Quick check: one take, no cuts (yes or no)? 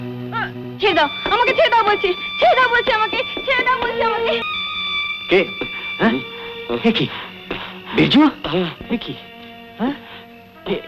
yes